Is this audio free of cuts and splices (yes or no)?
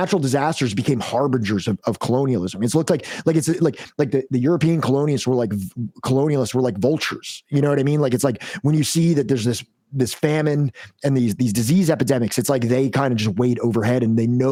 yes